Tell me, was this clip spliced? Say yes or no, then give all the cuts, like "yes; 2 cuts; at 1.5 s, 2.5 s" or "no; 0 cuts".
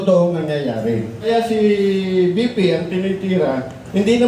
yes; 1 cut; at 1.3 s